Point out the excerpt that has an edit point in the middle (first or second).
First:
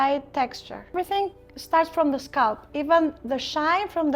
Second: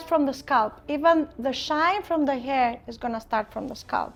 first